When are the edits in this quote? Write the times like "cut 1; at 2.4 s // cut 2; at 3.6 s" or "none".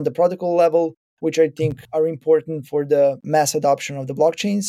cut 1; at 3.2 s